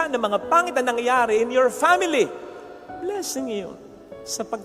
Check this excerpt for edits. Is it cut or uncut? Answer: uncut